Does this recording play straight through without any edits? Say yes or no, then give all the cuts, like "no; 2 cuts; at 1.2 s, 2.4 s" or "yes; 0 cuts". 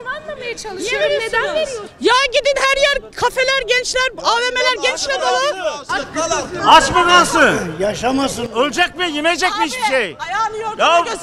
no; 1 cut; at 1.8 s